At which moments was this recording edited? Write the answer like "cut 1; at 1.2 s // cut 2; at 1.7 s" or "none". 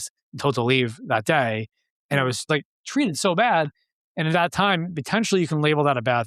cut 1; at 2.5 s